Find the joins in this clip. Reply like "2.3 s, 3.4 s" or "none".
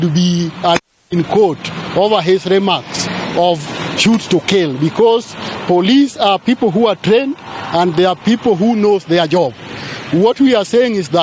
none